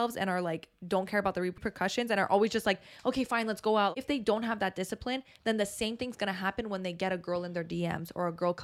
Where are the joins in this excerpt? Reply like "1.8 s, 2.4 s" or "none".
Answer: 1.6 s, 4.0 s